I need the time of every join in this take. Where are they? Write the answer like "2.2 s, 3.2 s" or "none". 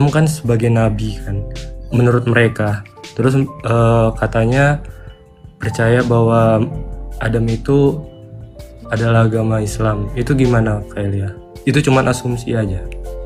none